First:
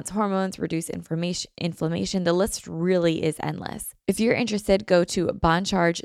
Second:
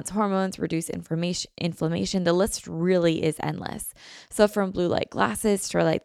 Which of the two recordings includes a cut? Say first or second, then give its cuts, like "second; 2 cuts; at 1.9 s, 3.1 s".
first; 1 cut; at 3.9 s